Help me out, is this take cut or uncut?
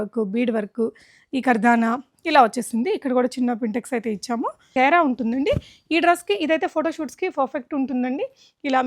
cut